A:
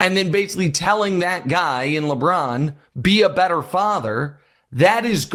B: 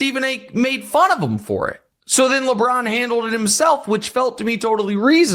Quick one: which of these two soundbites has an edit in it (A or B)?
B